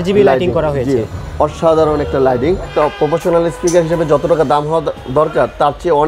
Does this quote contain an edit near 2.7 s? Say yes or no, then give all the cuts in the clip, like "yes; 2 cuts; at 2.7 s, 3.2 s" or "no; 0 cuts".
yes; 1 cut; at 2.7 s